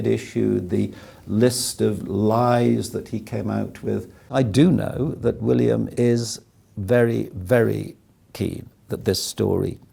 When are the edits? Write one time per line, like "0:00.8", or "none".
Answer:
0:04.3
0:05.9